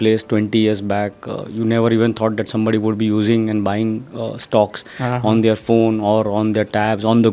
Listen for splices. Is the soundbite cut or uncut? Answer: uncut